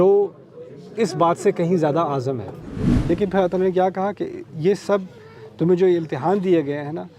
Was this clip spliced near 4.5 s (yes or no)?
no